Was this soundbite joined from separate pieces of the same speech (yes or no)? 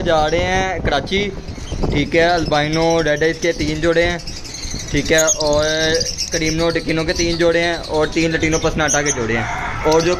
no